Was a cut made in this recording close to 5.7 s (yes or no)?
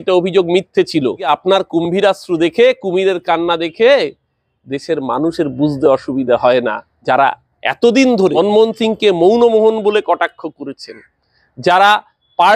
no